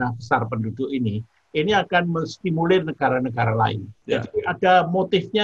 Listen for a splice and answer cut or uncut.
cut